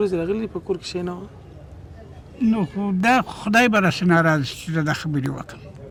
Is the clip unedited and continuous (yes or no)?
yes